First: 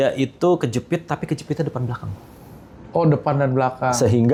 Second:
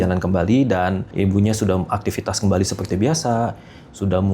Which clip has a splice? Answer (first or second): second